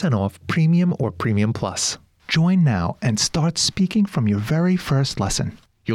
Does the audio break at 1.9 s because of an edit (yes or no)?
yes